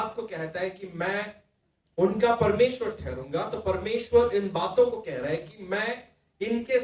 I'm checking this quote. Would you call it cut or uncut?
uncut